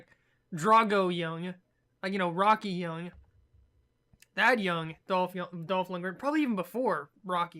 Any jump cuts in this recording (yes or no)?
no